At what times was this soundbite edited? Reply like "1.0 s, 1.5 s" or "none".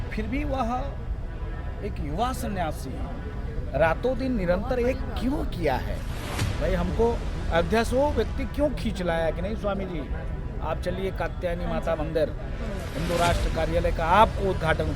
none